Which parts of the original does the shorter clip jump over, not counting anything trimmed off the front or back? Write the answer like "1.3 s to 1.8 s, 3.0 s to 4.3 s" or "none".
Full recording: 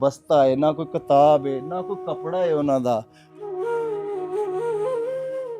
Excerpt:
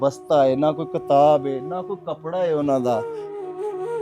3.1 s to 3.8 s